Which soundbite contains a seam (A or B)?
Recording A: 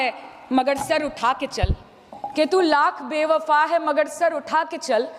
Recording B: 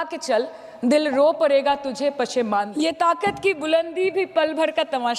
B